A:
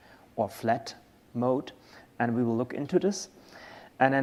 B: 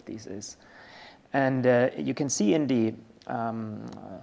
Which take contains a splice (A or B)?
B